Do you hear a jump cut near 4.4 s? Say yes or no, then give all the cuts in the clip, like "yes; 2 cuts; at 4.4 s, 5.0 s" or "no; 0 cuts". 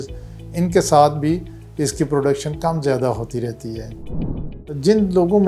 yes; 1 cut; at 4.4 s